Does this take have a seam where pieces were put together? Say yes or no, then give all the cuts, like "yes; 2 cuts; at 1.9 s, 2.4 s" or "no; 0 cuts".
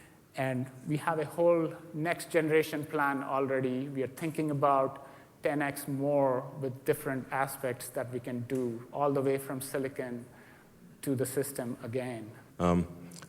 yes; 1 cut; at 12.3 s